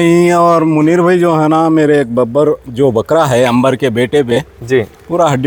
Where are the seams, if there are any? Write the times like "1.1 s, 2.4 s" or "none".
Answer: none